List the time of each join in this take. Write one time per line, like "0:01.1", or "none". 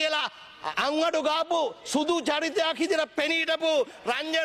none